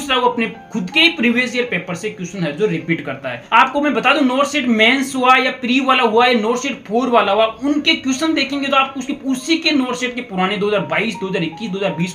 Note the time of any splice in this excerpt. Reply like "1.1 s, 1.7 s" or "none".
3.4 s